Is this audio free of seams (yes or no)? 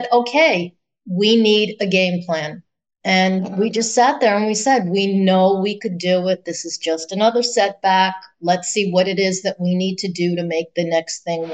yes